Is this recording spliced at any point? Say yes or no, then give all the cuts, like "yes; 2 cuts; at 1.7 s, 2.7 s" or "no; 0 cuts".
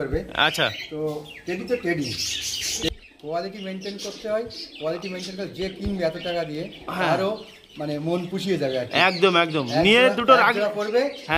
yes; 1 cut; at 2.9 s